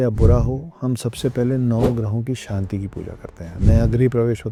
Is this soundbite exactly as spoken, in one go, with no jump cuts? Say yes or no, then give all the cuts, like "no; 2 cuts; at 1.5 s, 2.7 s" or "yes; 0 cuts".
yes; 0 cuts